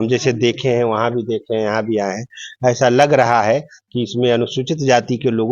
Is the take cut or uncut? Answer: uncut